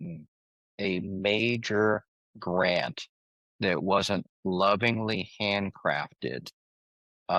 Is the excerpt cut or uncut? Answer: uncut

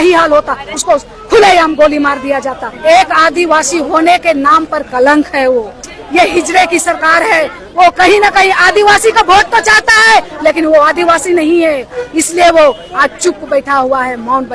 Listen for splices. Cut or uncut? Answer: cut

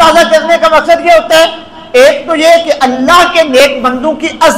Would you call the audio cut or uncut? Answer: uncut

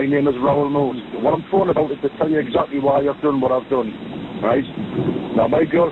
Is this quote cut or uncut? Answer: uncut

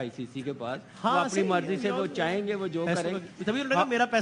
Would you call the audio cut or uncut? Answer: uncut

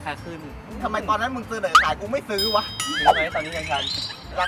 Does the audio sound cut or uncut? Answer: uncut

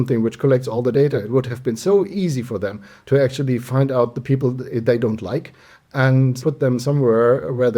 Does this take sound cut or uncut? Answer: cut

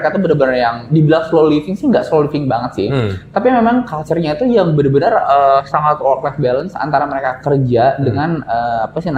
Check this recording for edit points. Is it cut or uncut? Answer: uncut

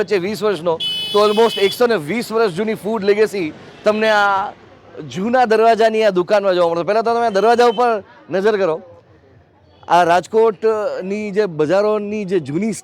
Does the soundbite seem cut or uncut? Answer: uncut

